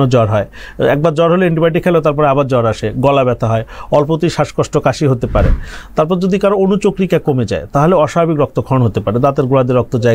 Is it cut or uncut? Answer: uncut